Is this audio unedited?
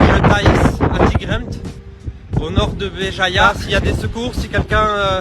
no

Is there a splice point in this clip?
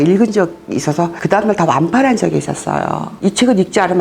yes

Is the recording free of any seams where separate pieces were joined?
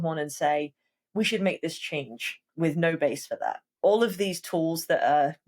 no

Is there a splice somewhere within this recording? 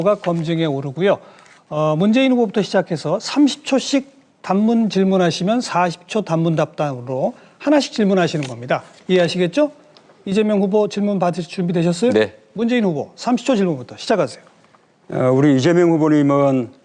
no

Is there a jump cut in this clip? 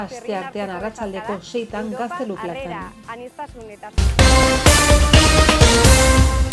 yes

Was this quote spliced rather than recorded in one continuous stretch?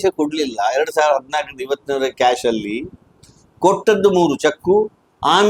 no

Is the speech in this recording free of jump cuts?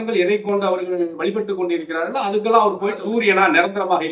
no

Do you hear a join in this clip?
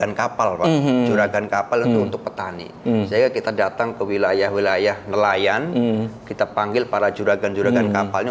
no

